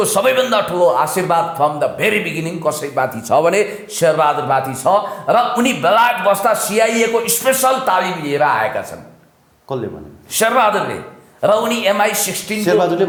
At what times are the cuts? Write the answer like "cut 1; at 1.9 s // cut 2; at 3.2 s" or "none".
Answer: none